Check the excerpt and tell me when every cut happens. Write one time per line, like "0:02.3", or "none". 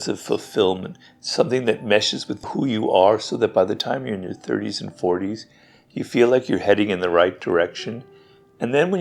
none